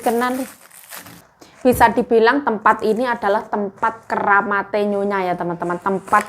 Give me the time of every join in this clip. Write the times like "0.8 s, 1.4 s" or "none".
1.2 s